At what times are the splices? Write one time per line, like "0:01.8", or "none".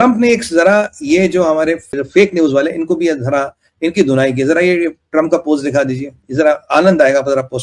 0:01.9